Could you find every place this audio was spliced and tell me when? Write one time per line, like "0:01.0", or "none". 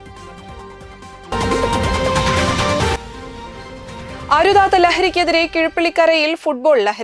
0:01.3